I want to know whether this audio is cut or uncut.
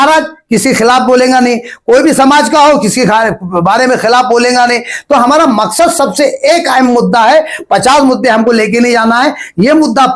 uncut